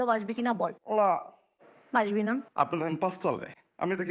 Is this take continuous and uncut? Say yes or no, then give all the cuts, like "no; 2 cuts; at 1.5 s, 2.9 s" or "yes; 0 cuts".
no; 1 cut; at 2.5 s